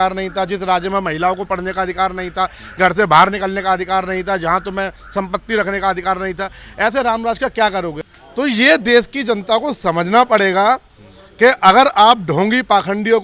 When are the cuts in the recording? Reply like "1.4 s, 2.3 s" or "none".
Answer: 8.0 s